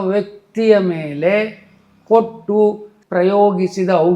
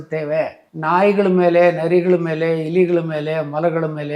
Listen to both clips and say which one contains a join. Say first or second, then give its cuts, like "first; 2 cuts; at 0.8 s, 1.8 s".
first; 1 cut; at 2.9 s